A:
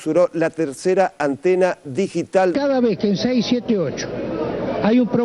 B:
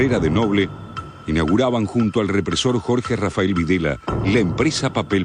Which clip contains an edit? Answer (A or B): A